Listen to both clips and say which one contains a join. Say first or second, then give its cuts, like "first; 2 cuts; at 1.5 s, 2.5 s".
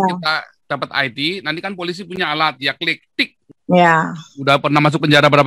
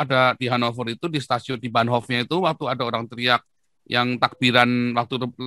first; 1 cut; at 3.4 s